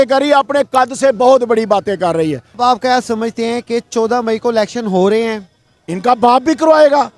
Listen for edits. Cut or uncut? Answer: cut